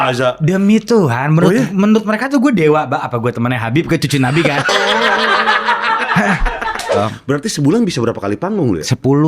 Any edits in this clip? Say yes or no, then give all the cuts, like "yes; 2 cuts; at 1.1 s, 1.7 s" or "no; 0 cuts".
yes; 1 cut; at 7.0 s